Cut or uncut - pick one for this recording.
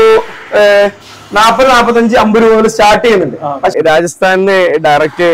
cut